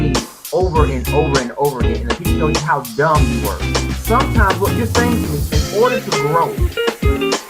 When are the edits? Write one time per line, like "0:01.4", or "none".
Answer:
0:05.8